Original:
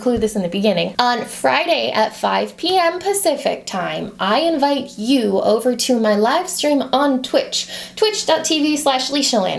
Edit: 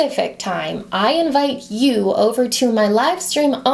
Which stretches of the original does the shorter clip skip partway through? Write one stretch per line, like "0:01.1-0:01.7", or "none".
none